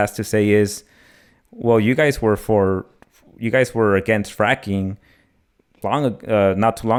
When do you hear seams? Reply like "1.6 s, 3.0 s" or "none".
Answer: none